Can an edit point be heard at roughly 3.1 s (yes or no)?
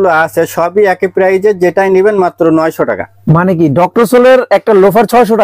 yes